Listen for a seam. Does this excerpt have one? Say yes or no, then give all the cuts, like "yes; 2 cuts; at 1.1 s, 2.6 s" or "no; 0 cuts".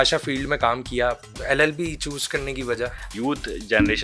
yes; 2 cuts; at 1.3 s, 3.0 s